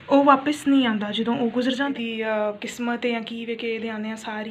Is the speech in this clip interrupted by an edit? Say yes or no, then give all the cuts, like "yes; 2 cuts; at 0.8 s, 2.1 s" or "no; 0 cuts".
yes; 1 cut; at 1.9 s